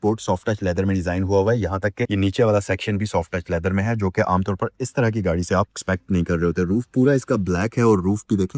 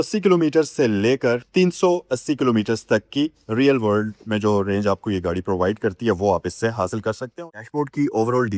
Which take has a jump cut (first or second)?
second